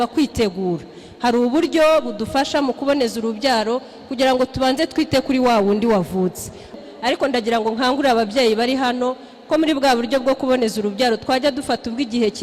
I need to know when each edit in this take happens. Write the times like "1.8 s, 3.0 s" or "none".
6.8 s